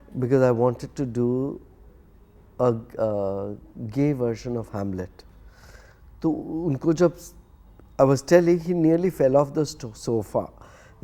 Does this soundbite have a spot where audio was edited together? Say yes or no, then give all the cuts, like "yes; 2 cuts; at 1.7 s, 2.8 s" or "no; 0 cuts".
no; 0 cuts